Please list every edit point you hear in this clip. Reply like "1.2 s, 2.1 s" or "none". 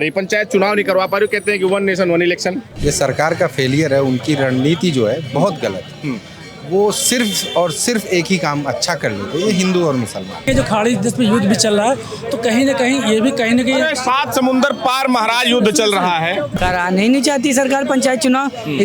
2.7 s, 10.4 s, 16.6 s